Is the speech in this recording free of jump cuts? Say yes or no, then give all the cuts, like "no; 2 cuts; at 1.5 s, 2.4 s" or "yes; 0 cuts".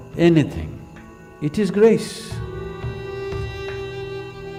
yes; 0 cuts